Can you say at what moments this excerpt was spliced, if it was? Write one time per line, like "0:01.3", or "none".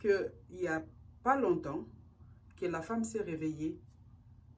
none